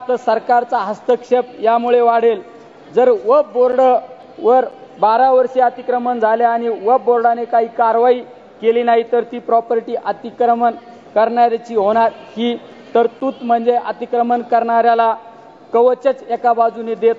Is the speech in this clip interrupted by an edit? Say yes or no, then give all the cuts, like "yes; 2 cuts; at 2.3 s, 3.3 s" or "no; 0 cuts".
no; 0 cuts